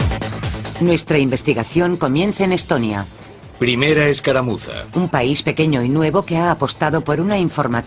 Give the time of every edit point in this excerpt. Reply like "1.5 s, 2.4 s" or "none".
4.7 s